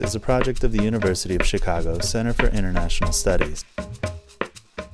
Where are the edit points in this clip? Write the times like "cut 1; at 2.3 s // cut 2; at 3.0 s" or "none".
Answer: cut 1; at 4.0 s